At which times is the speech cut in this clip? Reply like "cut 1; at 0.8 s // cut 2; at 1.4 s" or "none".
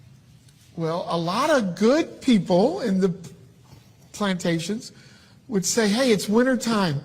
cut 1; at 5.7 s